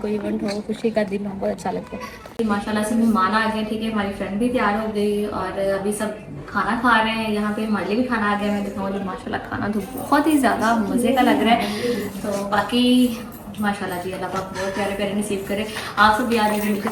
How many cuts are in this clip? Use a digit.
0